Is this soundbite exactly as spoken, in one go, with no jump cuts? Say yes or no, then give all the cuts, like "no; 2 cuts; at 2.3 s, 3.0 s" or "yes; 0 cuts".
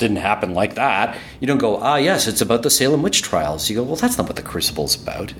yes; 0 cuts